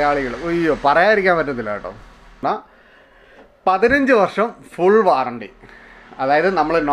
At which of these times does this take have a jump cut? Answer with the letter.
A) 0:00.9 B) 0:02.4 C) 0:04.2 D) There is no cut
B